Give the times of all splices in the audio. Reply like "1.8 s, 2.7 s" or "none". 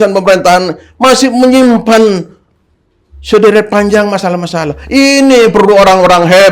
none